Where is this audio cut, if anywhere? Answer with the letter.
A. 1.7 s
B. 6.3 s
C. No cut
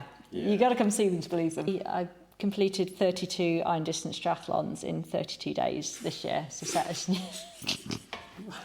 A